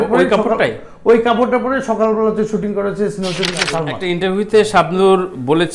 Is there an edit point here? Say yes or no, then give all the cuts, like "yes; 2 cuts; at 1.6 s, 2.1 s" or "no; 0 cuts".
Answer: yes; 1 cut; at 4.0 s